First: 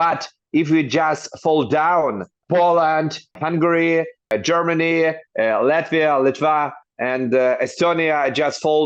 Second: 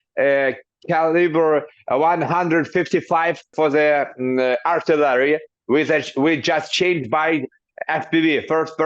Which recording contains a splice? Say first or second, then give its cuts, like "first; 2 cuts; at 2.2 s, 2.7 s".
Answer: first; 4 cuts; at 2.4 s, 3.4 s, 4.3 s, 5.3 s